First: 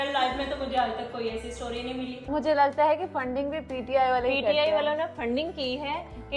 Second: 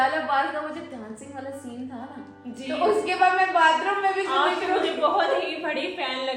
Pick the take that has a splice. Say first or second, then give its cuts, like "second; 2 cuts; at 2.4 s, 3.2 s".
first; 1 cut; at 2.2 s